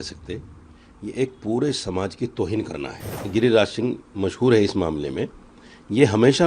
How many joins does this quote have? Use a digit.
1